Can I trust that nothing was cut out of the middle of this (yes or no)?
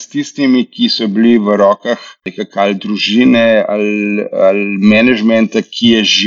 no